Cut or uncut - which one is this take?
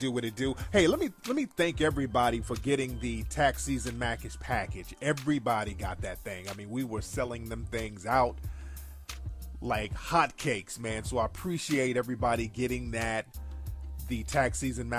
uncut